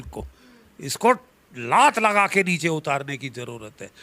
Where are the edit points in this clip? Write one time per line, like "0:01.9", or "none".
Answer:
none